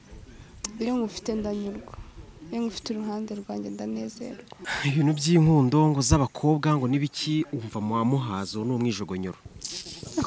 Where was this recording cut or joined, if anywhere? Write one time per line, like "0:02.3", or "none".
0:04.5